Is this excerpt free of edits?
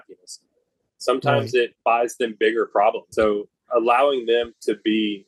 no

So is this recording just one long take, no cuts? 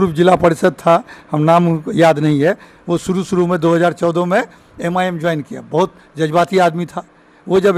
yes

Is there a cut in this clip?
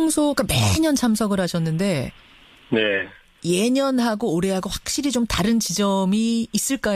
yes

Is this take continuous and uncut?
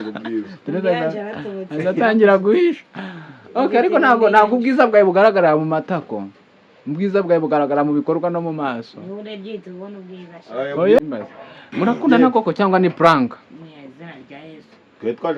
no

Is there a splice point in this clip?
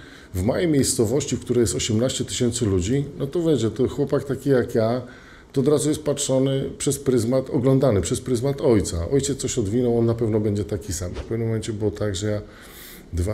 yes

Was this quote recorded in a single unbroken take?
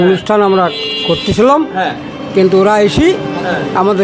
yes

